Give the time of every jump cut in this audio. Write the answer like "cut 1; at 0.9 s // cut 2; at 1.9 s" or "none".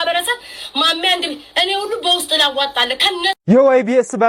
cut 1; at 3.4 s